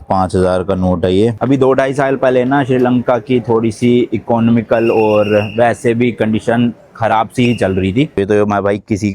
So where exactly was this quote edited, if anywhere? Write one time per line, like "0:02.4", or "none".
0:01.4
0:08.2